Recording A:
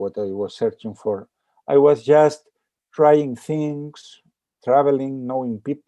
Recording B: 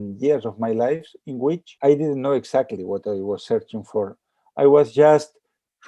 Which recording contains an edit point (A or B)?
B